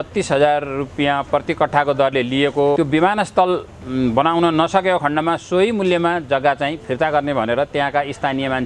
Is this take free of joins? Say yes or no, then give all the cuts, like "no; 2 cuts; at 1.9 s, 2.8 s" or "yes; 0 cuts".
no; 1 cut; at 2.8 s